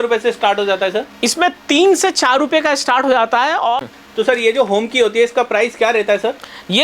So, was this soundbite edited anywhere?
yes; 1 cut; at 3.9 s

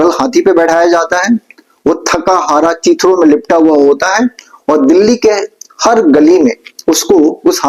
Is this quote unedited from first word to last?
yes; 0 cuts

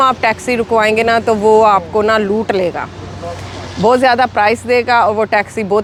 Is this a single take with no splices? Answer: yes; 0 cuts

